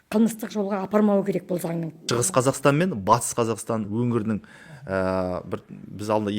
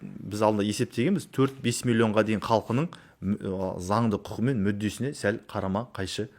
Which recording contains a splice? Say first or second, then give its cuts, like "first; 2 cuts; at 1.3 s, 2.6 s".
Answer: first; 2 cuts; at 1.9 s, 3.9 s